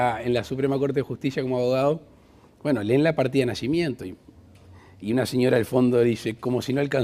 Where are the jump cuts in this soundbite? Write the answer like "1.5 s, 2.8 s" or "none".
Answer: 1.3 s